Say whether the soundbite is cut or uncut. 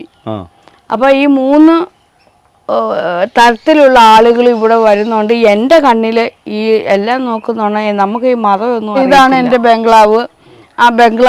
cut